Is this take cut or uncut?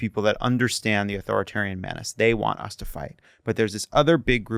uncut